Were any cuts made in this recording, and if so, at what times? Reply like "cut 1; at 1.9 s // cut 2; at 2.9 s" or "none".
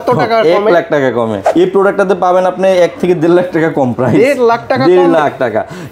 cut 1; at 1.4 s